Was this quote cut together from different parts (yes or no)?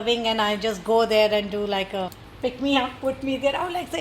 yes